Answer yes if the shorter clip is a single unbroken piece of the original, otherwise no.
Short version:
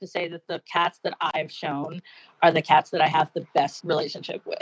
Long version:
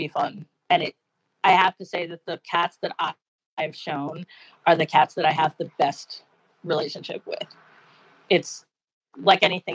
no